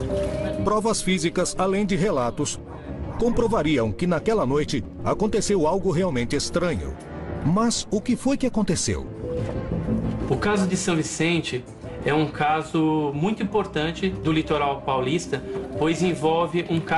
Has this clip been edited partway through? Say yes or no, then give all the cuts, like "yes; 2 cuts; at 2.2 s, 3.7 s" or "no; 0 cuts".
no; 0 cuts